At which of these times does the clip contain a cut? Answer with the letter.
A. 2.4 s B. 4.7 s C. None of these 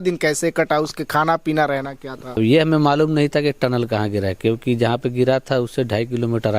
A